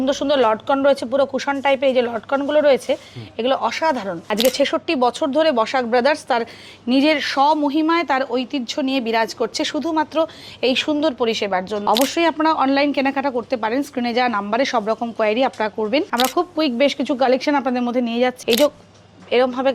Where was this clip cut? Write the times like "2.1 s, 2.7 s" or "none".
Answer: 4.2 s, 11.8 s, 16.1 s, 18.4 s